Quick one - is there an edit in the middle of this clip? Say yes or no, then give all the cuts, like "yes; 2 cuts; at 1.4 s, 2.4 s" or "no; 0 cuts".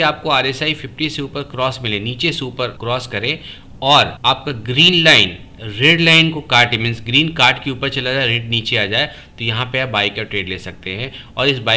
yes; 2 cuts; at 2.8 s, 4.1 s